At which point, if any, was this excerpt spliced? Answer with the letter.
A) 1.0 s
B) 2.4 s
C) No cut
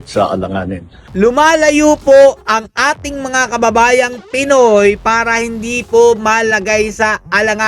A